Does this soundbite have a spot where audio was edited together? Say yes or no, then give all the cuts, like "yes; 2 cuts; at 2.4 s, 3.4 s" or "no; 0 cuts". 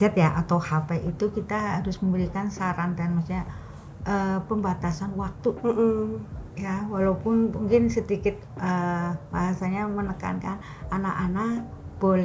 no; 0 cuts